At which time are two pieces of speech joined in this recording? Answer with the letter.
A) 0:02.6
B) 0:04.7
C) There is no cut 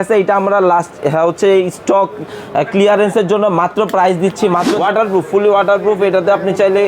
B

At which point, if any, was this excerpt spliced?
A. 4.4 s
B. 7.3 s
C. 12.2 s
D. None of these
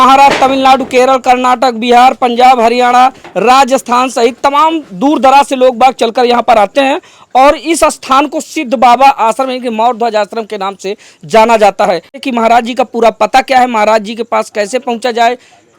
C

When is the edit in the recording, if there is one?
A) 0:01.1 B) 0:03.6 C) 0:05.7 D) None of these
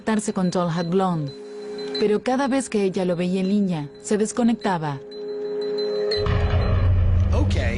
B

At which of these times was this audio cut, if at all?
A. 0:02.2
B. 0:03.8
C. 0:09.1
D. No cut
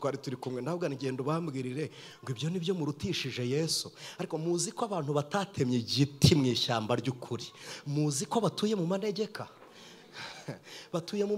D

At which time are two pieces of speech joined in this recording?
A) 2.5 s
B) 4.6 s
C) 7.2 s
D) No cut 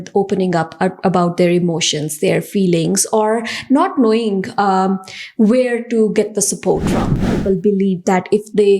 C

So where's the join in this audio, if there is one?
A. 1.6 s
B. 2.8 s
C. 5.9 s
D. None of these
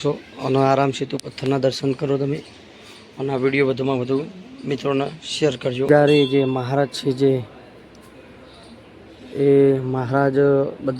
C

